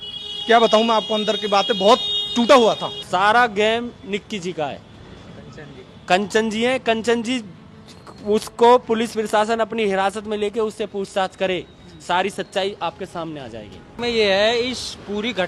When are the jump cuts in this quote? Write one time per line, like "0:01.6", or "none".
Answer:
0:02.9
0:14.0